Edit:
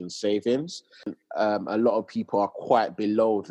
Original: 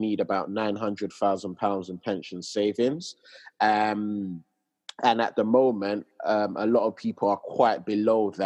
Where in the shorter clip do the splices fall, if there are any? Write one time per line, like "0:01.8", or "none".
0:01.1